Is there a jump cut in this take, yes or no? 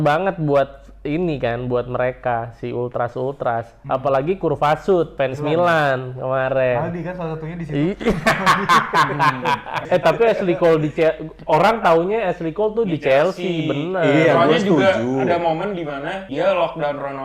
yes